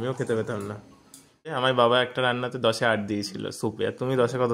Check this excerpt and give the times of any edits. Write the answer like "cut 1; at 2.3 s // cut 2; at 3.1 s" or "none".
cut 1; at 1.5 s